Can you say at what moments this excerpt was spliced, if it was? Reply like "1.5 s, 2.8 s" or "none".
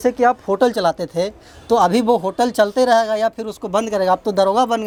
none